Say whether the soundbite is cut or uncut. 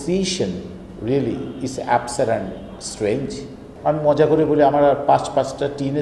uncut